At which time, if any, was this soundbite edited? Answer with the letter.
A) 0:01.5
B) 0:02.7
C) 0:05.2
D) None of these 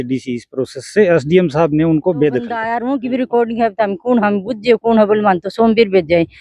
B